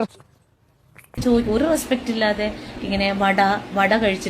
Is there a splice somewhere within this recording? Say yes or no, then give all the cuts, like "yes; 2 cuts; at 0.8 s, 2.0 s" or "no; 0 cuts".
yes; 1 cut; at 1.2 s